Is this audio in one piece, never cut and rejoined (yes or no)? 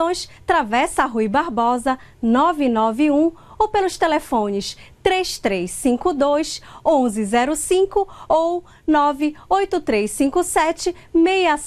yes